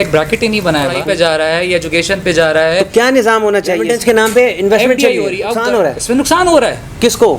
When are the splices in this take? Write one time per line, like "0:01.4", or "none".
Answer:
0:00.9
0:03.9
0:05.6